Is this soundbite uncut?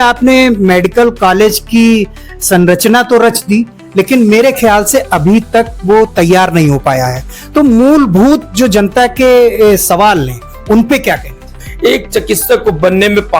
no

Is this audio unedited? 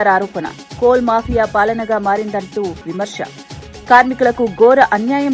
yes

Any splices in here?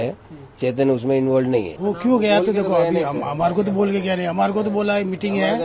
yes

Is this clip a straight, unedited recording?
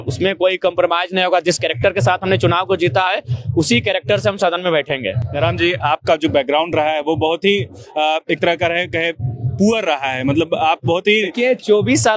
yes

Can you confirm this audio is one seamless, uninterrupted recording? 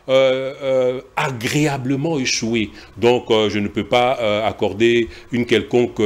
yes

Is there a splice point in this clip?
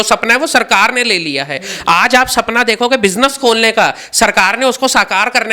no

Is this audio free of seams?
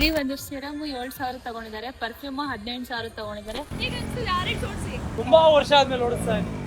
no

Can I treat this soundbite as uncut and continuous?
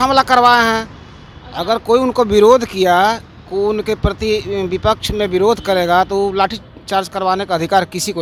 yes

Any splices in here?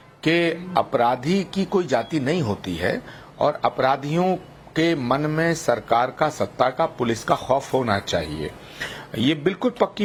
no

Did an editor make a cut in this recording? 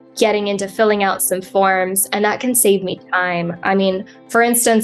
no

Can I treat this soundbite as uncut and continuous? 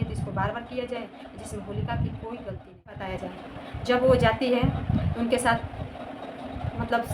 no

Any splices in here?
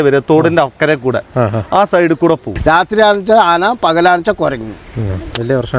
yes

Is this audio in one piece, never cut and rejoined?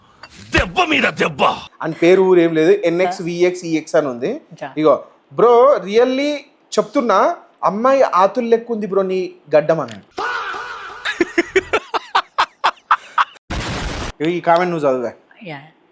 no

